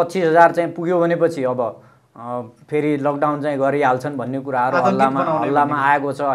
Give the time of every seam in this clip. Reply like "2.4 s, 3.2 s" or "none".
none